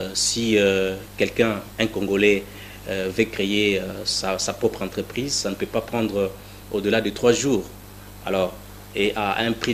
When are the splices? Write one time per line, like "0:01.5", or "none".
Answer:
none